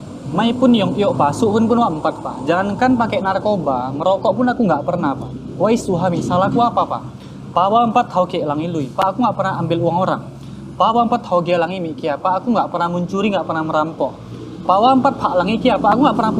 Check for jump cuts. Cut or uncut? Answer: uncut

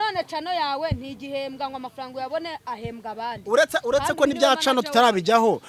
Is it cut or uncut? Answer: uncut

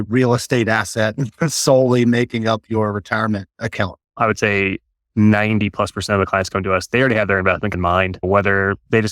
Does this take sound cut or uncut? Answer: cut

